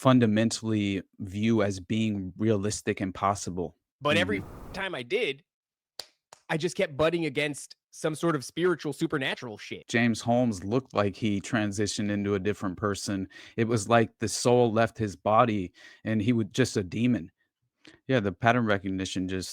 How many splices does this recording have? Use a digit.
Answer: 3